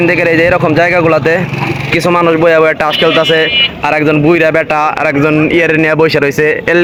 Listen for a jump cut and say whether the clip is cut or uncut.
uncut